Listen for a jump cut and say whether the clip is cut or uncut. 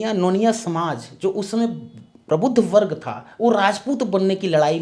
uncut